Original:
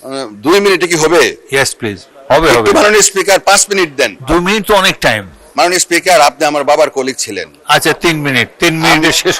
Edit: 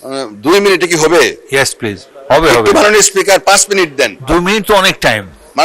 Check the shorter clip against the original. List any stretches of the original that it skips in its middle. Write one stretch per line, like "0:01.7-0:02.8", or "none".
none